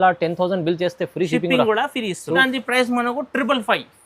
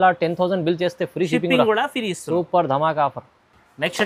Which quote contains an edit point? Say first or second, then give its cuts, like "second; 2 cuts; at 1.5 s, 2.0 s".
first; 1 cut; at 2.4 s